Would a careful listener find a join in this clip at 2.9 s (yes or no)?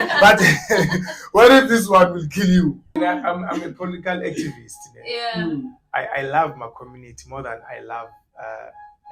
yes